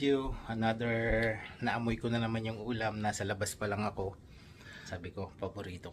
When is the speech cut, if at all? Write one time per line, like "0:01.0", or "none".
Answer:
0:04.8